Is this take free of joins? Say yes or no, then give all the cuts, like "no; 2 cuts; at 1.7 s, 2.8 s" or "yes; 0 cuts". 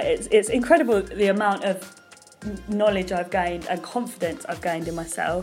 yes; 0 cuts